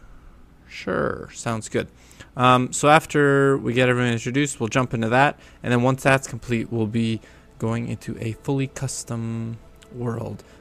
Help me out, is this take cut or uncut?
uncut